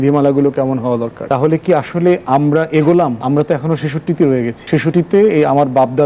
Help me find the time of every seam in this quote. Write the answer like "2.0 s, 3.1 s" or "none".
1.2 s, 3.2 s, 4.8 s